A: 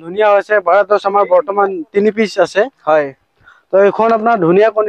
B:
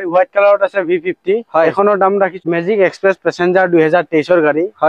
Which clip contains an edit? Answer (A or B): B